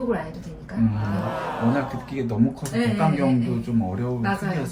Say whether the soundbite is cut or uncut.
uncut